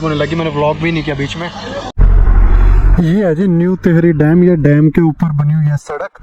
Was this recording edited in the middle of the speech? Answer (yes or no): yes